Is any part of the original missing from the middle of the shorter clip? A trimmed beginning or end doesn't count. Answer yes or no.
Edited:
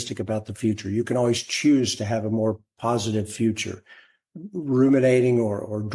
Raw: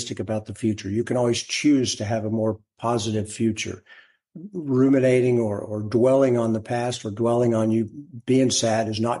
no